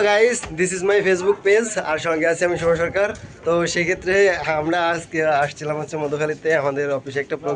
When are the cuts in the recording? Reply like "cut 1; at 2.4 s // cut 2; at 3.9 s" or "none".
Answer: none